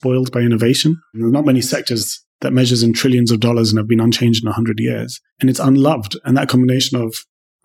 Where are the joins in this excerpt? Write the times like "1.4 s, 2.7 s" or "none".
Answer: 1.1 s

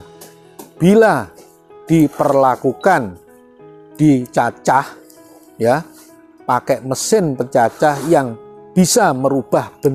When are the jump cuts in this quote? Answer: none

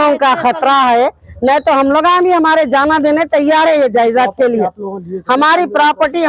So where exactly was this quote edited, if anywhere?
1.3 s

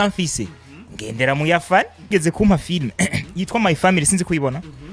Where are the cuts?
2.1 s

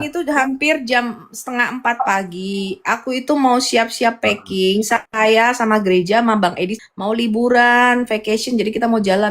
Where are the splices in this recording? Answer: 6.7 s

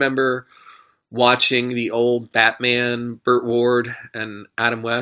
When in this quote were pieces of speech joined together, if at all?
none

